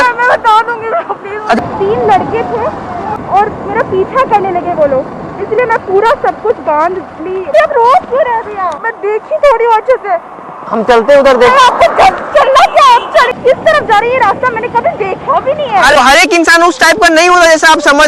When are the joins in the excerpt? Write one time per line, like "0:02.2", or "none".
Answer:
0:01.6
0:03.1
0:07.5
0:08.8
0:13.4
0:15.9